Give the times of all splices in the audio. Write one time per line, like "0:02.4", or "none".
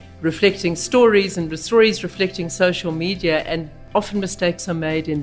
0:03.8